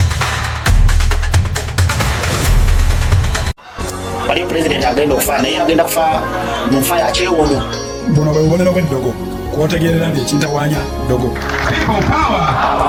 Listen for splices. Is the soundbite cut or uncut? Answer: uncut